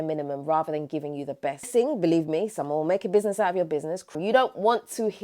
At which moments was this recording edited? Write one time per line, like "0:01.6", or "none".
0:01.7
0:04.1